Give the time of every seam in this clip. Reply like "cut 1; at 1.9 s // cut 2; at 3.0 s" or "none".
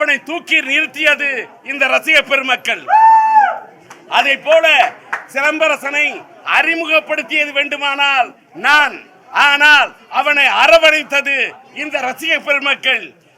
none